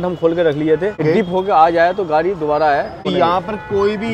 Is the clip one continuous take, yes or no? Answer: no